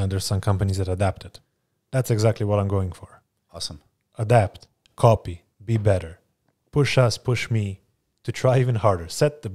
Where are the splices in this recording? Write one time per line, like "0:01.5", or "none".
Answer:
none